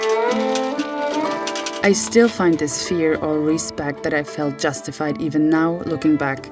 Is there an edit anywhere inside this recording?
yes; 1 cut; at 1.7 s

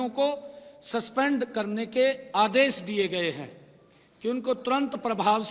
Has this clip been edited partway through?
no; 0 cuts

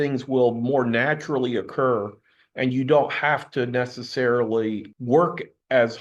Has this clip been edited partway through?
yes; 1 cut; at 4.9 s

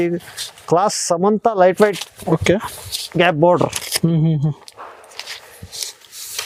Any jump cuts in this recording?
no; 0 cuts

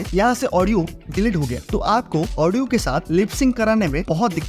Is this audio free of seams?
yes; 0 cuts

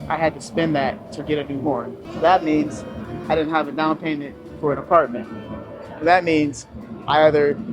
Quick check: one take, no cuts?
no; 1 cut; at 2.0 s

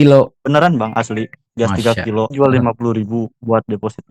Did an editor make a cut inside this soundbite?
yes; 1 cut; at 2.3 s

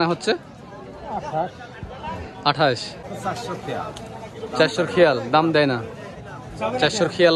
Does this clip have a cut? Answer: yes; 1 cut; at 3.1 s

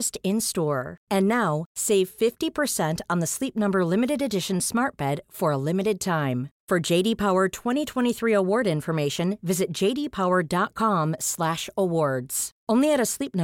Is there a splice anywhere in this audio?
no; 0 cuts

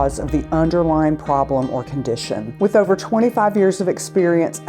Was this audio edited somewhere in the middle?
yes; 1 cut; at 2.5 s

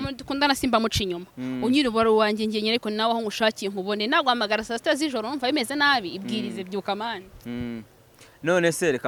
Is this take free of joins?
yes; 0 cuts

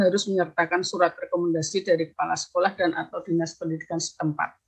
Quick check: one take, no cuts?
yes; 0 cuts

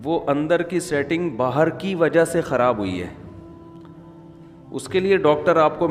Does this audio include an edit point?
yes; 2 cuts; at 3.2 s, 4.7 s

